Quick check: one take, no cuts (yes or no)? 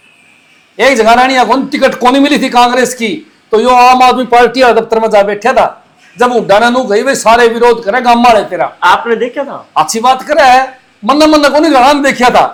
yes